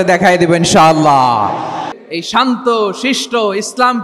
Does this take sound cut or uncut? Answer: cut